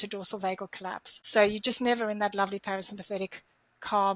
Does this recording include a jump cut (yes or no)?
yes